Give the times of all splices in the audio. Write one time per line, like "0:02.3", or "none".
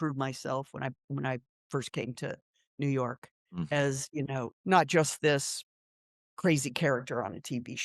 0:04.5